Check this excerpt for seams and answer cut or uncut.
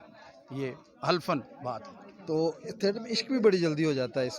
uncut